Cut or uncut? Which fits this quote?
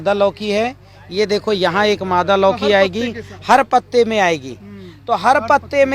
uncut